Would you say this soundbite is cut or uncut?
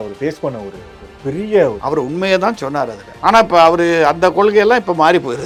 uncut